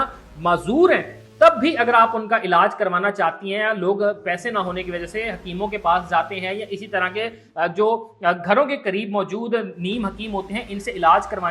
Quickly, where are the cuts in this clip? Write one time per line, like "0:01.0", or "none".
none